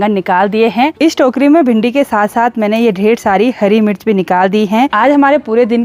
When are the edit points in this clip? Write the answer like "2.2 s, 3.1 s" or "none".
0.9 s, 4.9 s